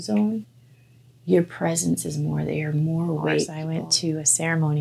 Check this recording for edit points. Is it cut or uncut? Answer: cut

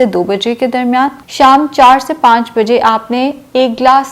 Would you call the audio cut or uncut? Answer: cut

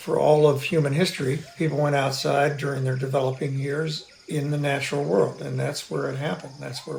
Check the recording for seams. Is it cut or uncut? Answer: uncut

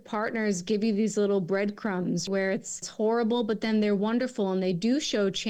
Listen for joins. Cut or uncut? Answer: uncut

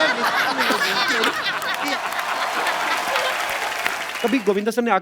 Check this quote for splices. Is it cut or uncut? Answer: cut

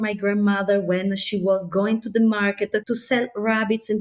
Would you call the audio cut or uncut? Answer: cut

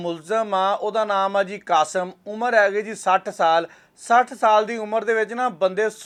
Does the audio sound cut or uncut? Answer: uncut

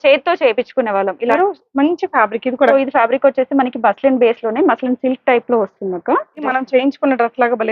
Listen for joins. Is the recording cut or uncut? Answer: cut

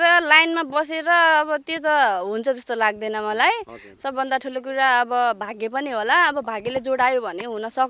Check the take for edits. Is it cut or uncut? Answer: uncut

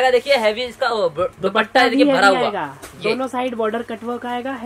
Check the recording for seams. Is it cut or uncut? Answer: uncut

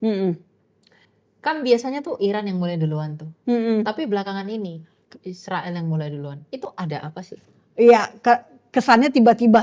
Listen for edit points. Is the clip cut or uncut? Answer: uncut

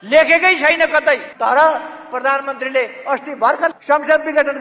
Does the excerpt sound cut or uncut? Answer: cut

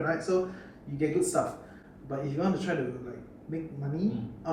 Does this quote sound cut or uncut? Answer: uncut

